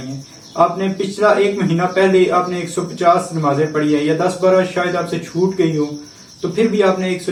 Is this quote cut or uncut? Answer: uncut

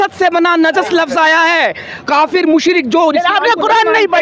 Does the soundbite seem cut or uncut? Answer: uncut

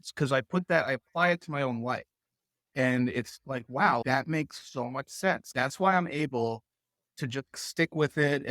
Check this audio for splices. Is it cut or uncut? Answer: cut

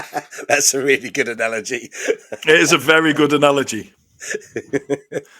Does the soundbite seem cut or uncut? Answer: uncut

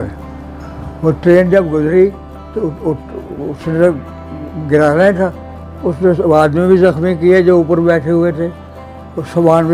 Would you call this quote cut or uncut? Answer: uncut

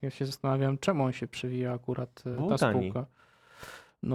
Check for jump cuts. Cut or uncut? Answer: uncut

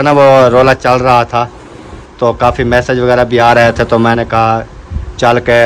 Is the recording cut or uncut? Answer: uncut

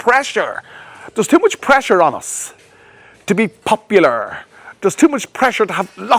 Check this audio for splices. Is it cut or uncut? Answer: uncut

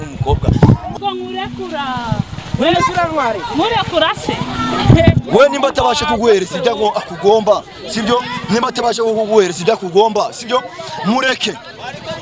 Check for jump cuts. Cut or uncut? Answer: cut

